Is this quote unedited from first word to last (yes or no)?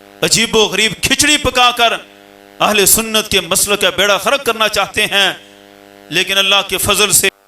yes